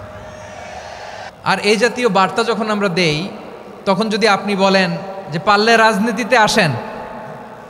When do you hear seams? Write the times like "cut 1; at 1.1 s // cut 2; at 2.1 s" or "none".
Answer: cut 1; at 1.3 s